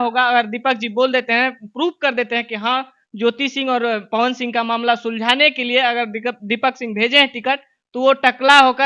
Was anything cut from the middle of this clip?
no; 0 cuts

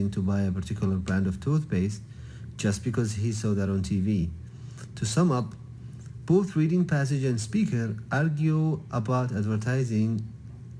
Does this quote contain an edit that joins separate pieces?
no; 0 cuts

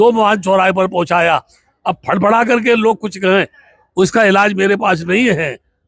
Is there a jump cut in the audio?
no; 0 cuts

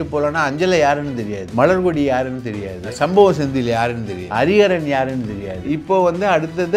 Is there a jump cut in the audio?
yes; 4 cuts; at 1.4 s, 2.8 s, 4.1 s, 5.6 s

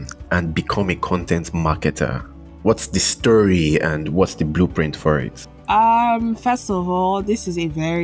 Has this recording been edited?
no; 0 cuts

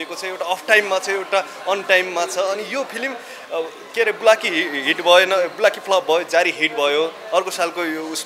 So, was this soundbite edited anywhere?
no; 0 cuts

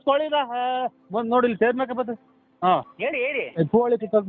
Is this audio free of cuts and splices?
no; 1 cut; at 2.9 s

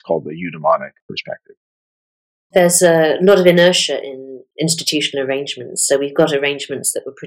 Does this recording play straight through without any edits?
no; 1 cut; at 2.4 s

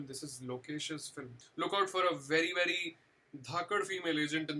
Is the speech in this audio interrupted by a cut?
yes; 1 cut; at 1.3 s

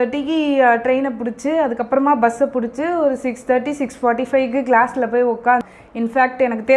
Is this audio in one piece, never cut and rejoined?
no; 1 cut; at 5.6 s

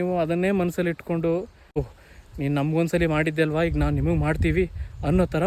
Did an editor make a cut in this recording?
yes; 1 cut; at 1.9 s

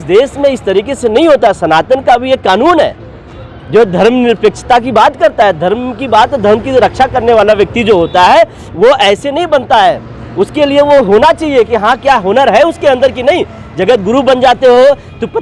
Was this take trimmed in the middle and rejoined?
no; 0 cuts

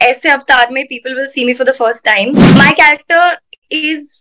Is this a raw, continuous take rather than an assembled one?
no; 1 cut; at 2.4 s

